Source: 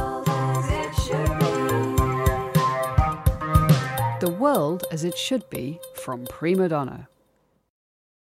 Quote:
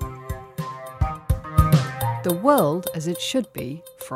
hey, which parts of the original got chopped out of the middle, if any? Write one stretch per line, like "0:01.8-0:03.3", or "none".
none